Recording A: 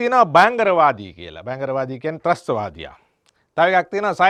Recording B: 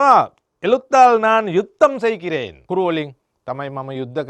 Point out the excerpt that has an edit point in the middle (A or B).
B